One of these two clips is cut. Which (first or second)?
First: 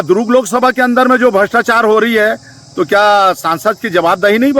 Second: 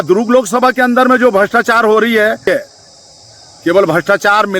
second